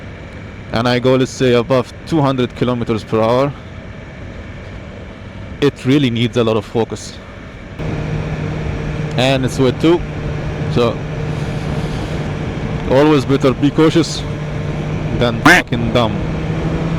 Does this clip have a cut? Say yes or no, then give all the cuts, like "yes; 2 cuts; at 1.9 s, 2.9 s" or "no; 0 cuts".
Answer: yes; 1 cut; at 7.8 s